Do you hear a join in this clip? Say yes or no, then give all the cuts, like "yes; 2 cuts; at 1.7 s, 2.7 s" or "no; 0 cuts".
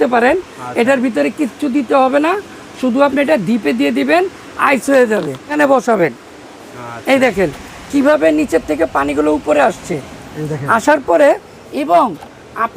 yes; 1 cut; at 5.5 s